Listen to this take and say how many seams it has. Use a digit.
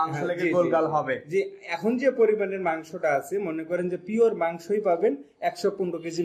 0